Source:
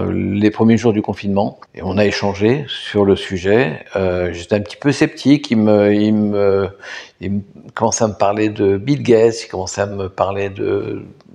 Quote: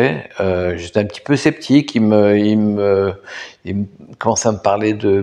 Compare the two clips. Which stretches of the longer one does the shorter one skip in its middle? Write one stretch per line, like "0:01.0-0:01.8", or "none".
none